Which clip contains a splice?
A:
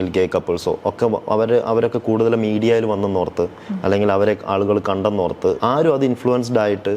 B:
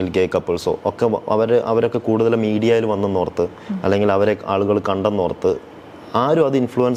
A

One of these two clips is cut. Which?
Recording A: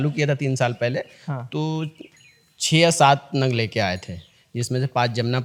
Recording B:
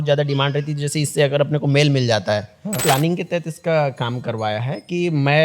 B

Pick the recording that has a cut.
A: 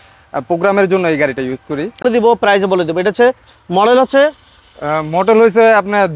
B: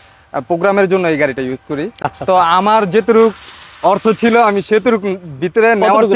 A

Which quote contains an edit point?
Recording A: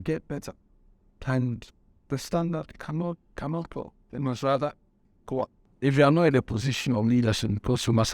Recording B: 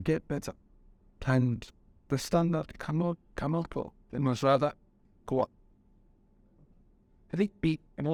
A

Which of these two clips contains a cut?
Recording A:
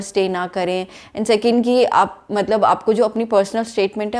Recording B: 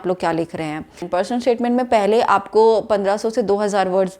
B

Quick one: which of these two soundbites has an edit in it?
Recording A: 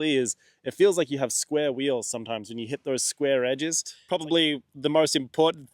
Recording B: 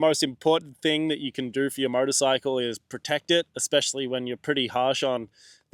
A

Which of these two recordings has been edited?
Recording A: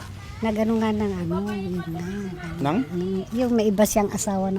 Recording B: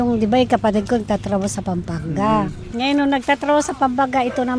B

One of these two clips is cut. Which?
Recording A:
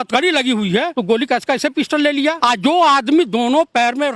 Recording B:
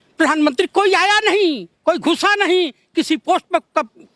A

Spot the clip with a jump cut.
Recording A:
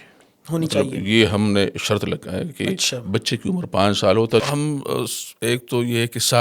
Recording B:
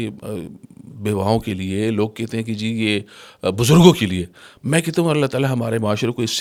A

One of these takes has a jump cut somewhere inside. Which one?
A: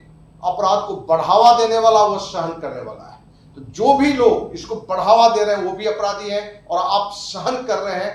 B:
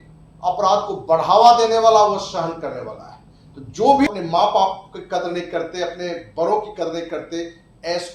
B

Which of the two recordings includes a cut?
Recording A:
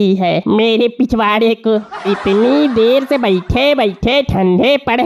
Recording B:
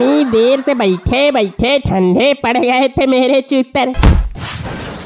B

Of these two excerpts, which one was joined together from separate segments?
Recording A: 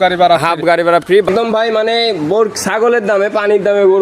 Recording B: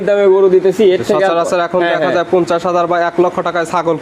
A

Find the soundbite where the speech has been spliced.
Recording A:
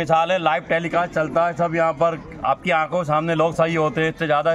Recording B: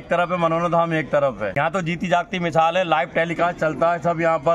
B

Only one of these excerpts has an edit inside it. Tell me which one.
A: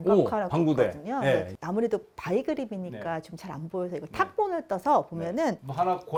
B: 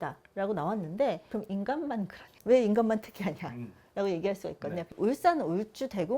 B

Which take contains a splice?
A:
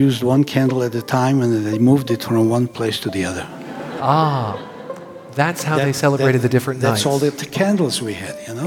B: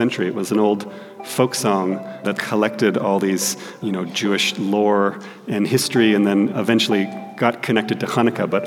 B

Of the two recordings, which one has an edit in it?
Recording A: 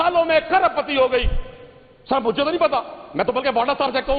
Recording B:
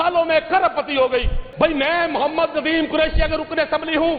B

